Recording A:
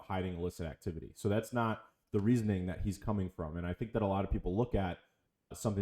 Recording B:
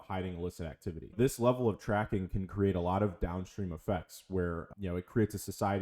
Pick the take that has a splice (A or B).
B